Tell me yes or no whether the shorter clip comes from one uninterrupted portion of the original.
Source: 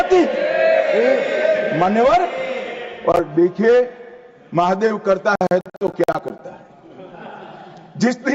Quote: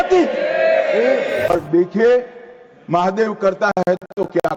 no